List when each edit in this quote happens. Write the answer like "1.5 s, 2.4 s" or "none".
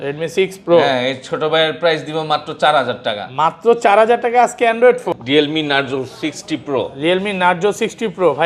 5.1 s